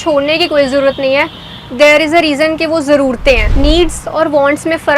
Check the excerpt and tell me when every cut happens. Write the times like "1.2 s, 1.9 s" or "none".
3.5 s